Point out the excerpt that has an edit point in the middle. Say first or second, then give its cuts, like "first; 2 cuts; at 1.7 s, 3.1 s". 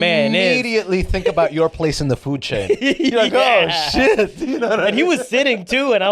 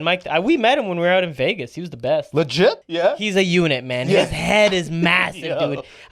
second; 1 cut; at 2.9 s